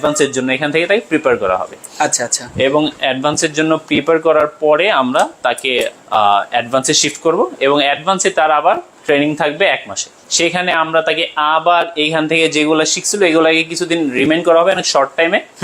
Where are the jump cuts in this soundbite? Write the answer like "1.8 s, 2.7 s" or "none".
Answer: none